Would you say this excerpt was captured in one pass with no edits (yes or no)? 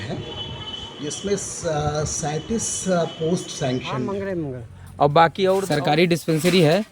no